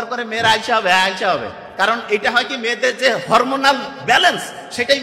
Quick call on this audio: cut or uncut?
uncut